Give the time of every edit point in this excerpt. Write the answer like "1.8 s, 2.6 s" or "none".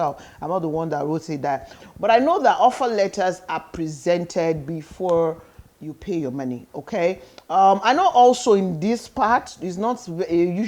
1.8 s